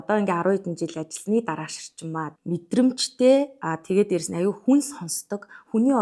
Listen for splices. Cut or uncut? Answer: cut